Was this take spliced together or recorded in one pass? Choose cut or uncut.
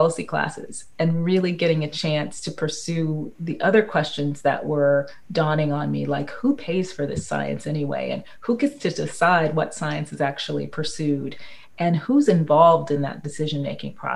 uncut